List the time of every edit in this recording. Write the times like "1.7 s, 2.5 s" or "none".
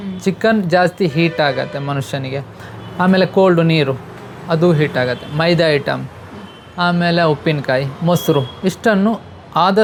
none